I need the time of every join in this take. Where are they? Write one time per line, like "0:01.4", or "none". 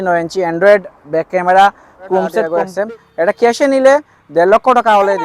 0:02.5